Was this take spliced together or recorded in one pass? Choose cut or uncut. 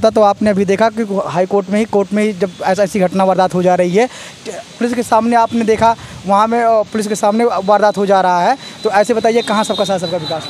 uncut